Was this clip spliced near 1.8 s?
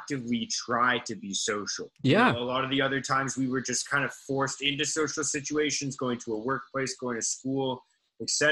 yes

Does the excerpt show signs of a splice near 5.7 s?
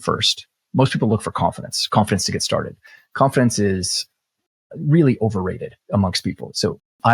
yes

